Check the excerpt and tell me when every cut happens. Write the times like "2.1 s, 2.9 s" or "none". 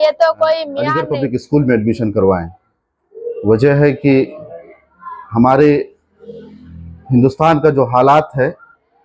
1.0 s